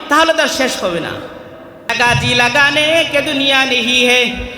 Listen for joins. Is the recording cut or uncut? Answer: cut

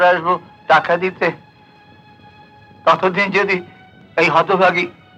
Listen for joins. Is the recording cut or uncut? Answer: uncut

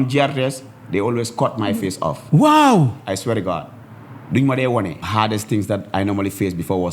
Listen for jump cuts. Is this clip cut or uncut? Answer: cut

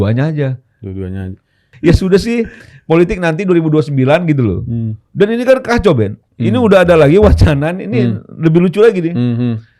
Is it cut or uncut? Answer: cut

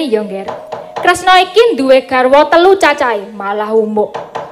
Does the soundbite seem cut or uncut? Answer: cut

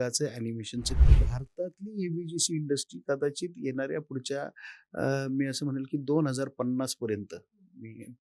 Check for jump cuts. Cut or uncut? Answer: cut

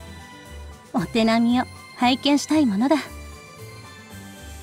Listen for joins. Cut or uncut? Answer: cut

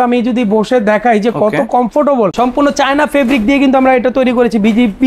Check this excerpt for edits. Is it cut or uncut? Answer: cut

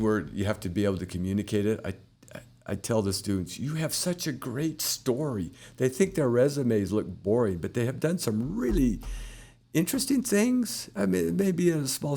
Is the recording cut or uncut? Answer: uncut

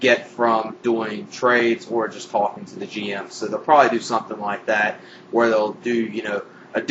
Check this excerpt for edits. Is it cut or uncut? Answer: cut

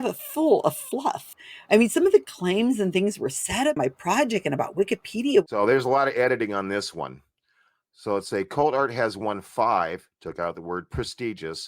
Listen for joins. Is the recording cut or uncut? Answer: cut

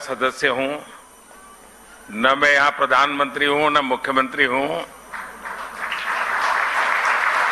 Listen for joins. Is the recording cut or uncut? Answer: uncut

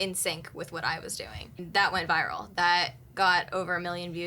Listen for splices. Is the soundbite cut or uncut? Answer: cut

